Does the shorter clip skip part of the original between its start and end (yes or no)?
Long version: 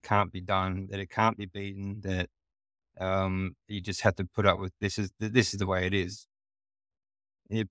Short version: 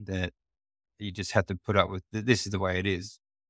yes